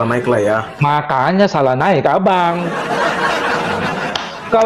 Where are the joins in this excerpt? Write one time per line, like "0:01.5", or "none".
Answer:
none